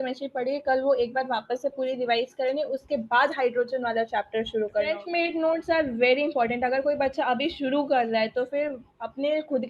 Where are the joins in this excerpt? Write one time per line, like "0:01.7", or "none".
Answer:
0:05.0

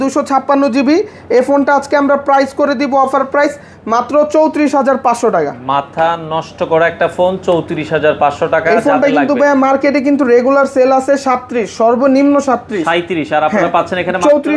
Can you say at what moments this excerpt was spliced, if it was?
none

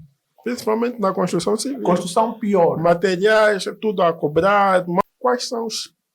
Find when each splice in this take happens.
0:05.0

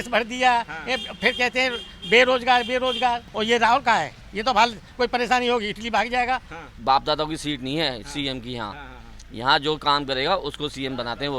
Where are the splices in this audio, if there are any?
0:03.3
0:06.7

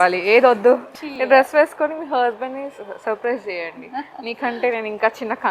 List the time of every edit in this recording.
0:01.0

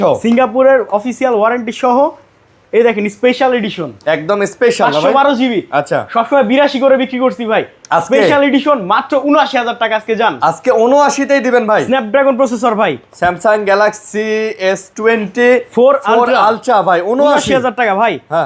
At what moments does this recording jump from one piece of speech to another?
none

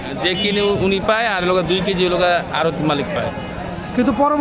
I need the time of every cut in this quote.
none

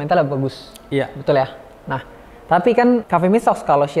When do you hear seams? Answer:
0:03.0

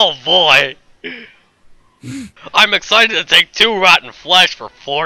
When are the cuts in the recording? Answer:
0:02.4

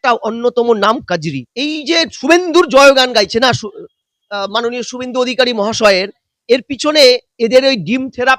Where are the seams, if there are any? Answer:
0:01.4

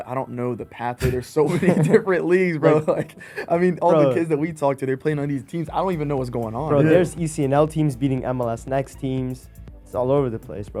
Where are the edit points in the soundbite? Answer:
none

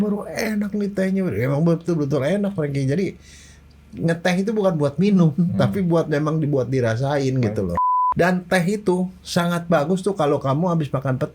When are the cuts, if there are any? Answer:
0:07.8

